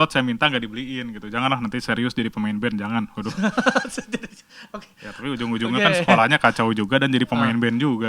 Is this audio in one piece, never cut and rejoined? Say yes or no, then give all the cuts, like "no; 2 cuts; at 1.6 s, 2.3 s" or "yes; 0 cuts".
yes; 0 cuts